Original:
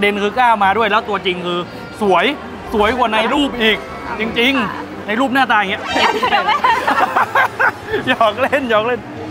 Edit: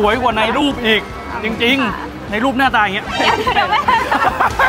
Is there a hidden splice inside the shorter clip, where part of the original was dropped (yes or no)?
no